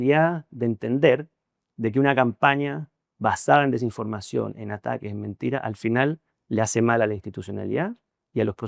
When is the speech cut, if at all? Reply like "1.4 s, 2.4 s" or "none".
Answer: none